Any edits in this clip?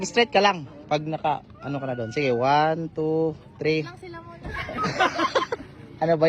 no; 0 cuts

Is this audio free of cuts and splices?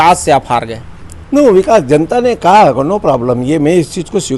yes; 0 cuts

